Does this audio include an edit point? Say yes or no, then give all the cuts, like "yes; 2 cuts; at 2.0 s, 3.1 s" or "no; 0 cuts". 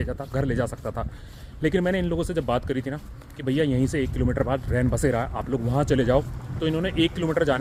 no; 0 cuts